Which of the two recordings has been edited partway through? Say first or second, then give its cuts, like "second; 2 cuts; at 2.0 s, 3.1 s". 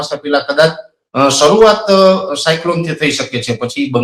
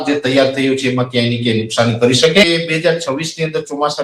second; 1 cut; at 2.4 s